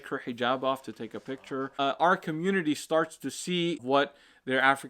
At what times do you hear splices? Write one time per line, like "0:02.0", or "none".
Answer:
0:01.7
0:03.8